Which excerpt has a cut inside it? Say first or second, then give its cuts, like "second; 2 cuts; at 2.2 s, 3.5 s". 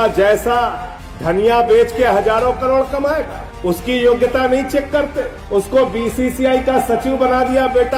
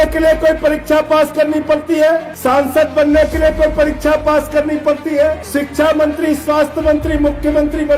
second; 2 cuts; at 2.3 s, 5.4 s